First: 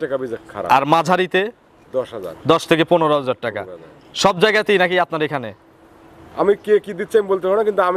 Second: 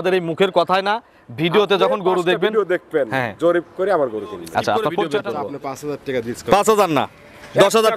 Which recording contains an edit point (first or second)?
second